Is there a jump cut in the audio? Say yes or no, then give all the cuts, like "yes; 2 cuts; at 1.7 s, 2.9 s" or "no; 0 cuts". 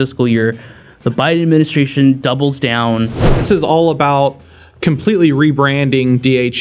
yes; 1 cut; at 3.4 s